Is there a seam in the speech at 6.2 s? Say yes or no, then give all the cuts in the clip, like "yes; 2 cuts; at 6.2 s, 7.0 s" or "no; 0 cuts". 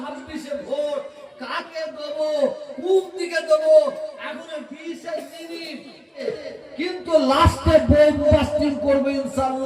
yes; 1 cut; at 6.2 s